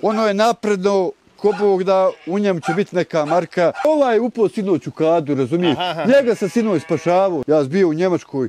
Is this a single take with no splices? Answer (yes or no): no